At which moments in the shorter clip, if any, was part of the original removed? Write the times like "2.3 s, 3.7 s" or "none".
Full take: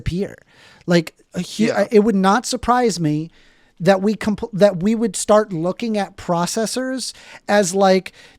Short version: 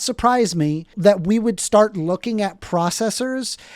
0.9 s